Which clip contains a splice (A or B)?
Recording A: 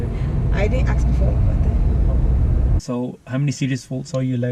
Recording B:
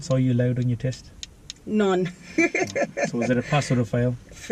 A